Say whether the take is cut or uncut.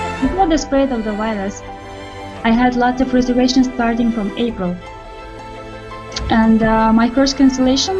uncut